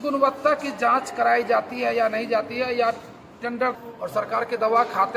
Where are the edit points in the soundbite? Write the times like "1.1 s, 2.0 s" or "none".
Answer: 3.7 s